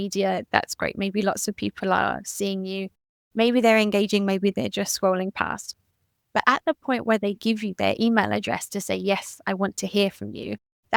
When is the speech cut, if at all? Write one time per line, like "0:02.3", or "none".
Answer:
none